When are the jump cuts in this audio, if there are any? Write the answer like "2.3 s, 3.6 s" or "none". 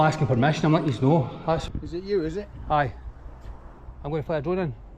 1.6 s